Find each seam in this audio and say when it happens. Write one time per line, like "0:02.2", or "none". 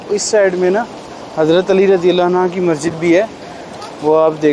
none